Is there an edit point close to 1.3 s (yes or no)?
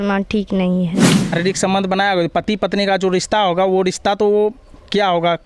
yes